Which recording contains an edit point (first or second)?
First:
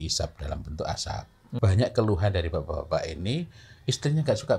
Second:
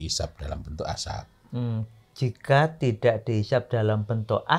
first